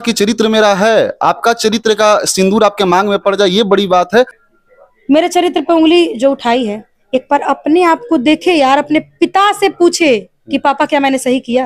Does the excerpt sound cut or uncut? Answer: cut